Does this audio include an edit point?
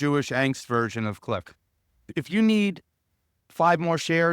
yes; 1 cut; at 2.0 s

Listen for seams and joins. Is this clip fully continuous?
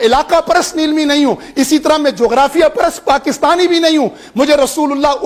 yes; 0 cuts

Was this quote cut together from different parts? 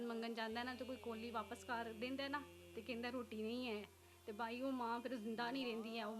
no; 0 cuts

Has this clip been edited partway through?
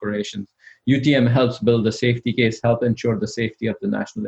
no; 0 cuts

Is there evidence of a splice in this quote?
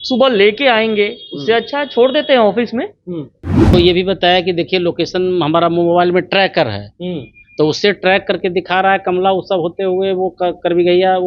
yes; 1 cut; at 3.7 s

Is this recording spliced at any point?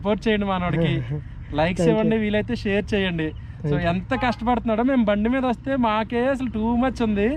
no; 0 cuts

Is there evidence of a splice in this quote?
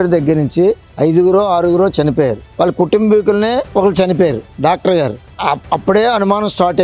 yes; 2 cuts; at 2.5 s, 3.7 s

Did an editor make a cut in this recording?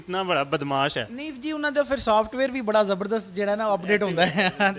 no; 0 cuts

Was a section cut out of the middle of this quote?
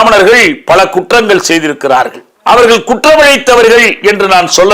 yes; 1 cut; at 2.3 s

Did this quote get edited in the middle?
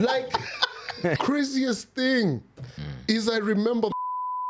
yes; 1 cut; at 1.2 s

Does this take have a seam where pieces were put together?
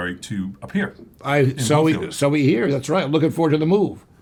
no; 0 cuts

